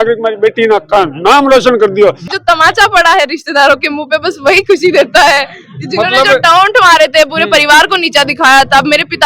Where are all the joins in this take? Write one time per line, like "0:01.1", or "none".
0:02.3